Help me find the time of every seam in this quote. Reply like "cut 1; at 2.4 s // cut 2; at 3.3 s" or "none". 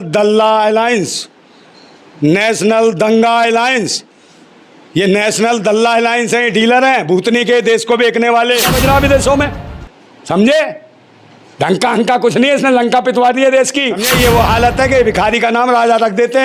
cut 1; at 8.7 s // cut 2; at 14.0 s